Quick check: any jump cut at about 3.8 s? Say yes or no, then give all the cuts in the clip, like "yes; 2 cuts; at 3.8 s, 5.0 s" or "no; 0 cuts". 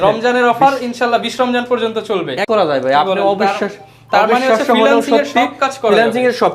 no; 1 cut; at 2.4 s